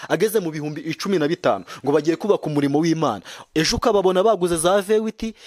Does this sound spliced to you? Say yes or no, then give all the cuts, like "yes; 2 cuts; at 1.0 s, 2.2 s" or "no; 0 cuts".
no; 0 cuts